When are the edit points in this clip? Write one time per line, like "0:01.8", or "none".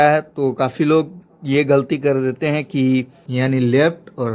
0:03.2